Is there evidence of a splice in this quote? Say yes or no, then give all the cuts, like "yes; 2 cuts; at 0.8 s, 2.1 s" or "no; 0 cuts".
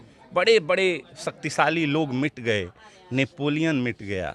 no; 0 cuts